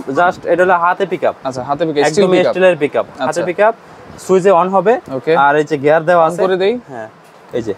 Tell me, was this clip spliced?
no; 0 cuts

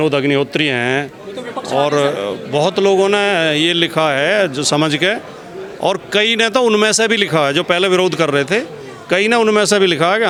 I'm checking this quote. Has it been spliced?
no; 0 cuts

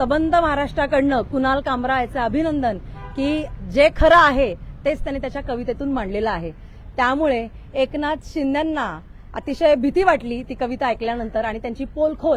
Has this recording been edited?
no; 0 cuts

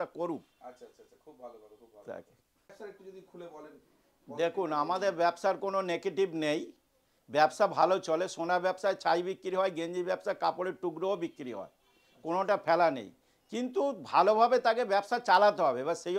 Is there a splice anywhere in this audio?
yes; 1 cut; at 2.7 s

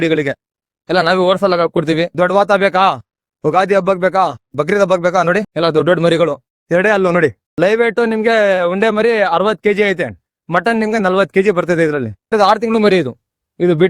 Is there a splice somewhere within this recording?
yes; 5 cuts; at 2.1 s, 5.5 s, 6.5 s, 7.4 s, 12.3 s

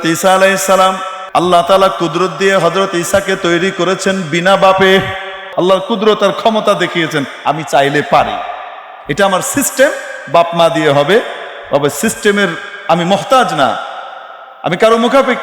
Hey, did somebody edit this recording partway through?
yes; 2 cuts; at 1.1 s, 5.4 s

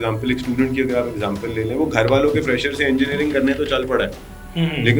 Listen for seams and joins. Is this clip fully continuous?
yes; 0 cuts

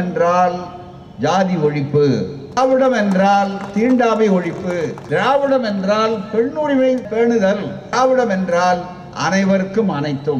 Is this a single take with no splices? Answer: no; 3 cuts; at 2.6 s, 5.0 s, 7.3 s

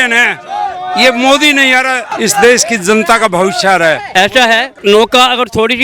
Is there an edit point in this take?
yes; 2 cuts; at 2.1 s, 4.5 s

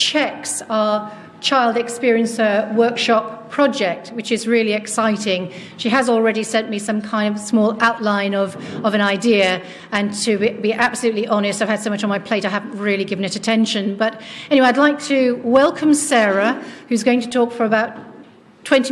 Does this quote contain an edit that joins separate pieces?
yes; 1 cut; at 17.8 s

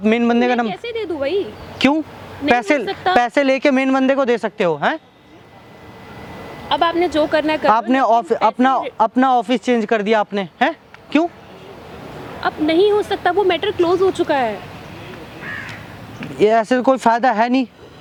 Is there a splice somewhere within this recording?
no; 0 cuts

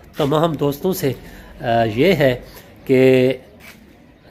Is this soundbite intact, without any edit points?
yes; 0 cuts

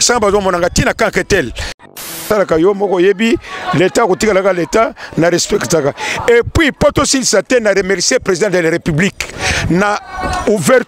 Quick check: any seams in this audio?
yes; 1 cut; at 2.2 s

